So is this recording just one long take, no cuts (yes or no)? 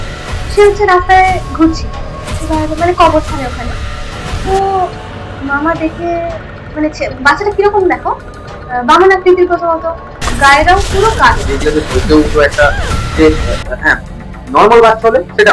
no